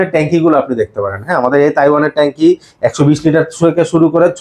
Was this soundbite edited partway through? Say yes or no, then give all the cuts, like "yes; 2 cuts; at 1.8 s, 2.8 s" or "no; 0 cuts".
no; 0 cuts